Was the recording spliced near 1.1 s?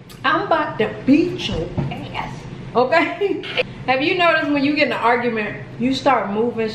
no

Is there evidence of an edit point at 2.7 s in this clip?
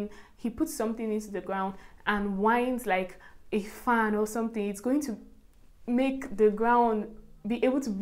no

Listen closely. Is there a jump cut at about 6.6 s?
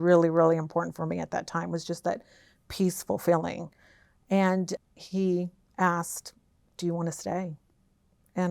no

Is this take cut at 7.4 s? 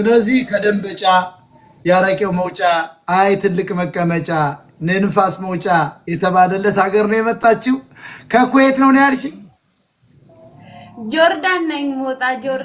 no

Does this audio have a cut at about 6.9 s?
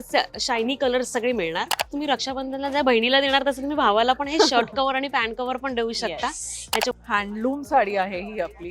yes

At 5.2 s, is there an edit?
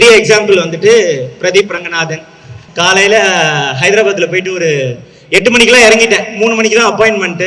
no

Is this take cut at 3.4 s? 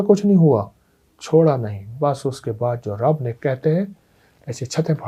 no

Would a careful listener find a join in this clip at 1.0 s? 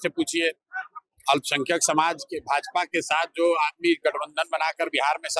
no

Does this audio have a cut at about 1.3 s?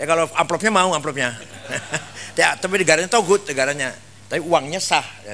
no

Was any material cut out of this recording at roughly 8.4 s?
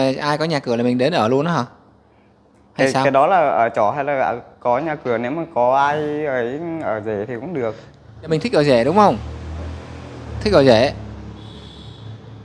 yes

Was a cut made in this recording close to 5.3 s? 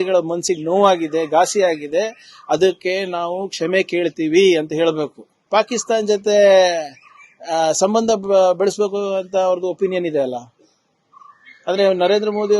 yes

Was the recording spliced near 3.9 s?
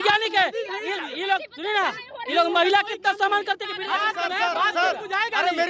no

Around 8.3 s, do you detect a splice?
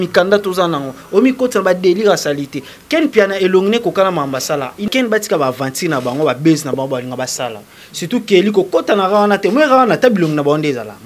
no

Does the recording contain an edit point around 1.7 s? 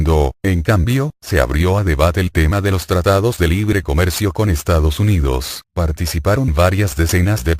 no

